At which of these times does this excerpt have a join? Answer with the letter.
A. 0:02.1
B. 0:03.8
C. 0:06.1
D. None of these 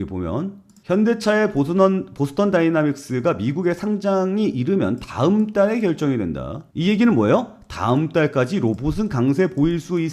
D